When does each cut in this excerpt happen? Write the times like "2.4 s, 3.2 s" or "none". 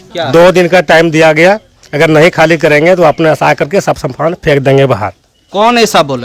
none